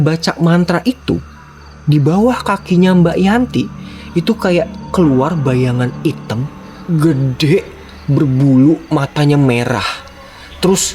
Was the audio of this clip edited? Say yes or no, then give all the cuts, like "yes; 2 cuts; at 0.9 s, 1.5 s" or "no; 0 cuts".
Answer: no; 0 cuts